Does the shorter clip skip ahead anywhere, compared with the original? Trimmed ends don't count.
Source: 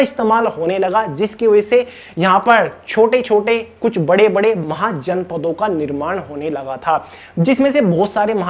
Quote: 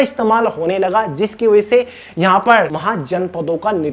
yes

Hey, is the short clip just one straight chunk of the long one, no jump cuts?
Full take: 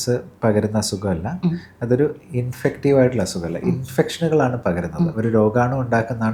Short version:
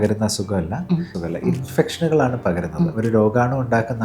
no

